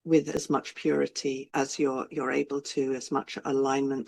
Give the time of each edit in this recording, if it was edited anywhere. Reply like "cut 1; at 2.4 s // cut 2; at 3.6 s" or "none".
cut 1; at 1.4 s